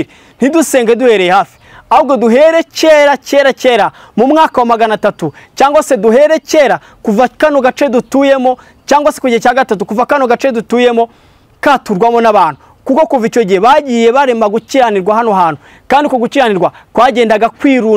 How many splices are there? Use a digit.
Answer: 0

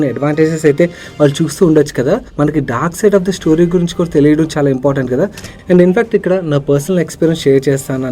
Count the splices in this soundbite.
2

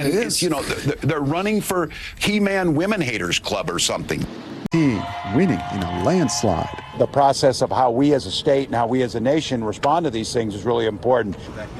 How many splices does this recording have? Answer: 1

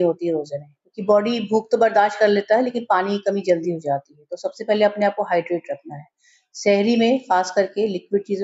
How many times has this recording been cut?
0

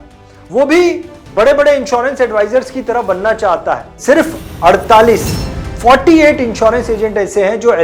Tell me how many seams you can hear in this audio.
1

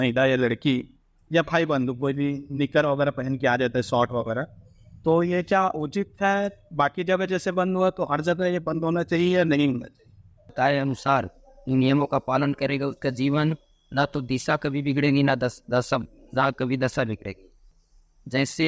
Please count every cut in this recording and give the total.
2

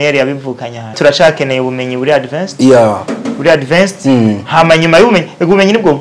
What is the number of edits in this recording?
1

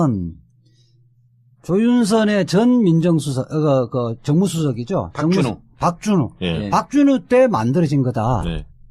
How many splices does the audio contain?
1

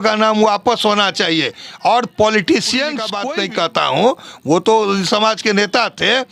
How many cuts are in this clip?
1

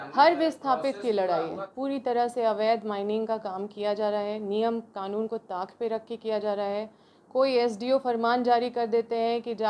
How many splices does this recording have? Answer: 1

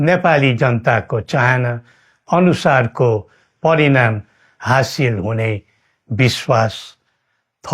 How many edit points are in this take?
0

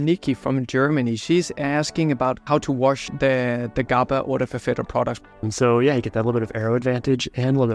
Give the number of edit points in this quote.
2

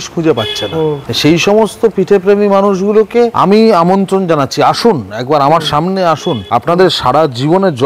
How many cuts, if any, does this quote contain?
3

